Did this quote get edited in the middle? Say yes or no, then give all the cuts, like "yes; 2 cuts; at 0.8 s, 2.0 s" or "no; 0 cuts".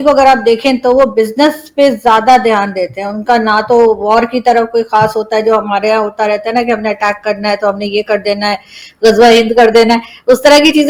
no; 0 cuts